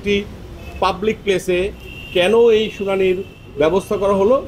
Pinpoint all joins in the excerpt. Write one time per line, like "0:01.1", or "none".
none